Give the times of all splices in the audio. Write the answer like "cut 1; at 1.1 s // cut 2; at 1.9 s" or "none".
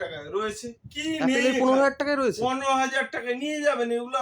none